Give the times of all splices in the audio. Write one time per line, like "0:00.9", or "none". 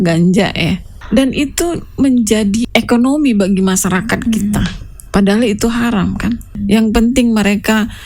0:00.9
0:02.6
0:06.6